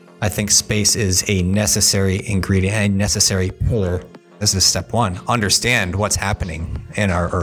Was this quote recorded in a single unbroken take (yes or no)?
no